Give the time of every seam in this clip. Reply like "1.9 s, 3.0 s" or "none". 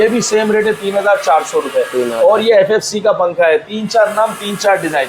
none